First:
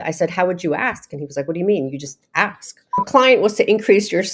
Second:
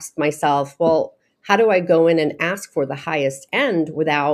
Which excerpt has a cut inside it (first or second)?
first